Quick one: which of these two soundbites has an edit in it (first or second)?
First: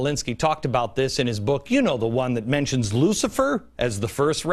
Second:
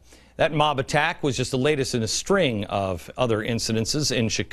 first